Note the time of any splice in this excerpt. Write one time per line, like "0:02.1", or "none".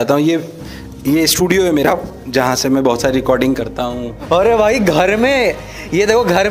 0:04.2

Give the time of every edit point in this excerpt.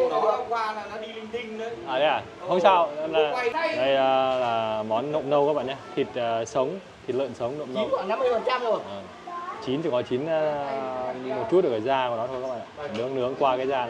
0:03.5

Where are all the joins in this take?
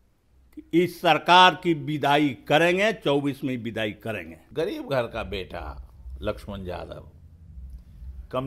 0:04.4

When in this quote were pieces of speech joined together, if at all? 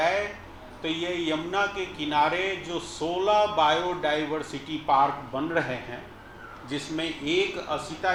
none

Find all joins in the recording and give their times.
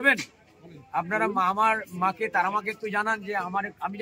none

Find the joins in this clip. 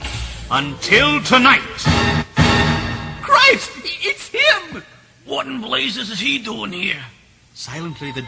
0:03.8

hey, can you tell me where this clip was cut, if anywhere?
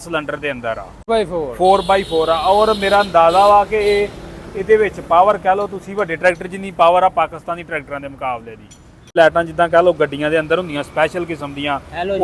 0:01.1
0:09.1

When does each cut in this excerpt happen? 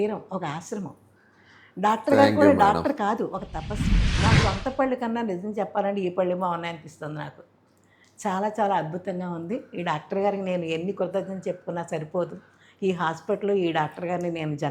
0:04.1

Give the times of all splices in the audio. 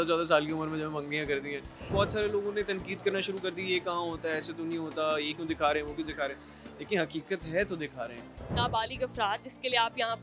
0:01.9
0:08.5

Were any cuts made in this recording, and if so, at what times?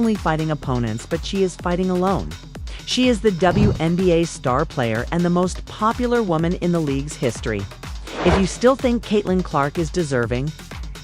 none

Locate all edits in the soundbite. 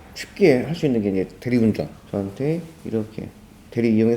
0:02.0

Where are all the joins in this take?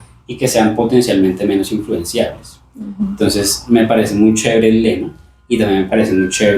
none

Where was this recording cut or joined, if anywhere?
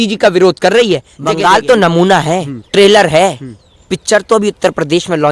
0:01.1
0:02.6

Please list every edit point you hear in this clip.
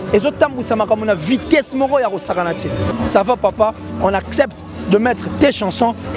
0:02.9

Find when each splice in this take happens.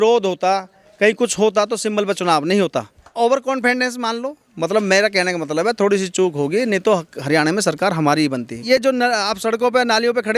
0:03.0
0:08.6

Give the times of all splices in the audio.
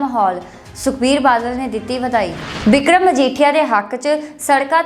0:02.4

